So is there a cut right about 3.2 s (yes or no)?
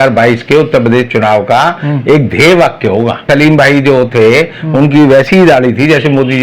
yes